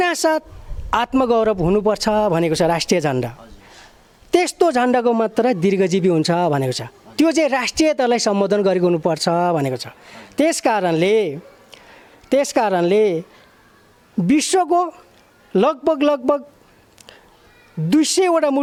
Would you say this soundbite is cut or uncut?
uncut